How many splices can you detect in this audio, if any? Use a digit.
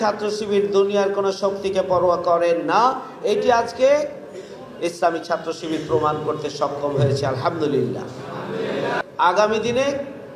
1